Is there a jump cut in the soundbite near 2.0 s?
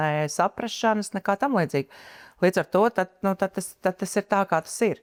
no; 0 cuts

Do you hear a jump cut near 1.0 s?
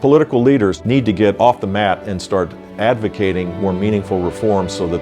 yes; 1 cut; at 1.0 s

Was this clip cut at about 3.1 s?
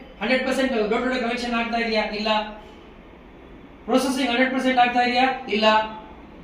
no; 0 cuts

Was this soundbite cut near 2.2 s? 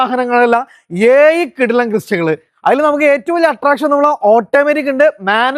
no; 0 cuts

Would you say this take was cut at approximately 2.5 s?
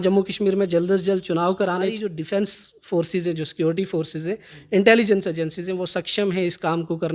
yes; 1 cut; at 2.5 s

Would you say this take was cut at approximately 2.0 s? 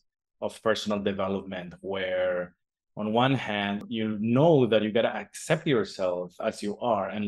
no; 1 cut; at 3.8 s

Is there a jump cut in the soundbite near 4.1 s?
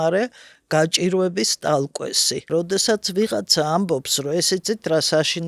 no; 1 cut; at 2.5 s

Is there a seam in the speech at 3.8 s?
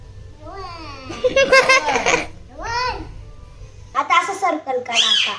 yes; 1 cut; at 3.8 s

